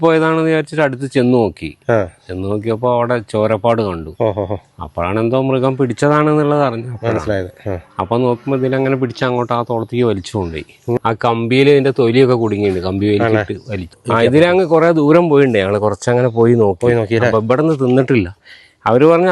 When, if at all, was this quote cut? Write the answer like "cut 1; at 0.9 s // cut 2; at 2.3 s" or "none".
cut 1; at 11.0 s // cut 2; at 14.0 s